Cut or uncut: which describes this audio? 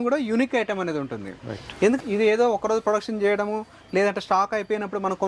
cut